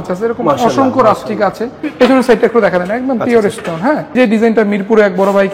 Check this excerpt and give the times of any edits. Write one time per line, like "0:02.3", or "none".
0:01.9
0:04.1